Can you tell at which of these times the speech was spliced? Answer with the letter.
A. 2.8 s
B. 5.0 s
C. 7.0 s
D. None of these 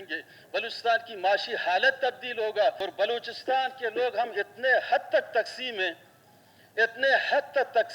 A